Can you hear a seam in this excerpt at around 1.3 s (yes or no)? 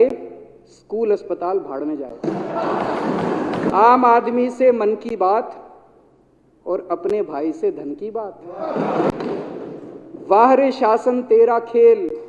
no